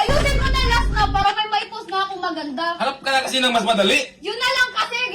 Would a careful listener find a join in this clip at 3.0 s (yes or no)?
no